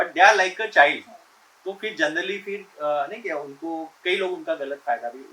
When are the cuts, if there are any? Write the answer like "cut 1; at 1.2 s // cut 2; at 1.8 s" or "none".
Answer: none

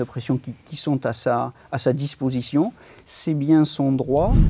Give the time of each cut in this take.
none

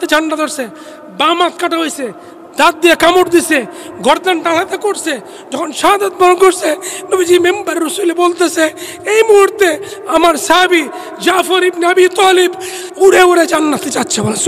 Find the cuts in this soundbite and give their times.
none

